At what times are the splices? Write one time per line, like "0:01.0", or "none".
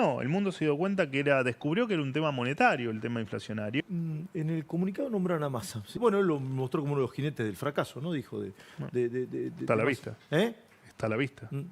0:03.8